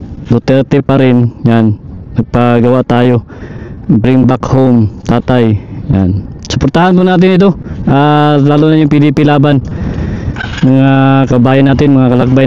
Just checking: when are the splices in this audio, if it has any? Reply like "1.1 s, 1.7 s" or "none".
none